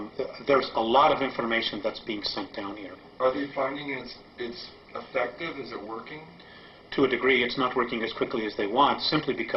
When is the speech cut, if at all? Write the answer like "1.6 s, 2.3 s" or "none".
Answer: 2.3 s